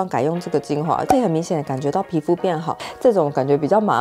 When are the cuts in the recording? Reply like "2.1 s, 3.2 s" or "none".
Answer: 2.8 s